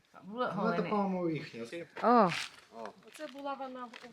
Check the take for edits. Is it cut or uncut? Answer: cut